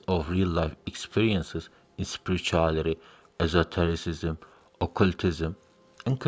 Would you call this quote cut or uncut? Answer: uncut